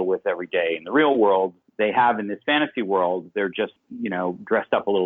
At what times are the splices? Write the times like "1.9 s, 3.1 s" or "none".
1.6 s, 3.8 s